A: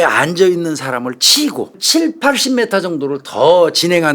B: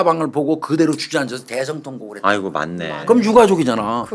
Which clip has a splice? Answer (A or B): A